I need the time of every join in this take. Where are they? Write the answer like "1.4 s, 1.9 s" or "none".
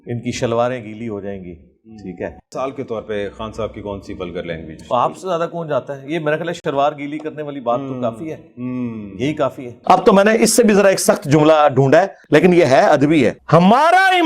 1.4 s, 2.4 s, 6.6 s, 9.7 s, 12.2 s